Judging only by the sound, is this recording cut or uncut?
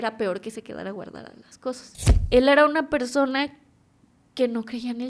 cut